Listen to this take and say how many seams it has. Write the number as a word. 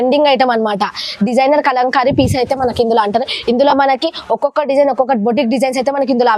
zero